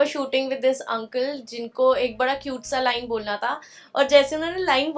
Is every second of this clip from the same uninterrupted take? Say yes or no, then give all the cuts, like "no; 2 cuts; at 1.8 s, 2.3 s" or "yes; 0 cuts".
yes; 0 cuts